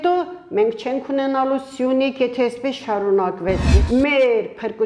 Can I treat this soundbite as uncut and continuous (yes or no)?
no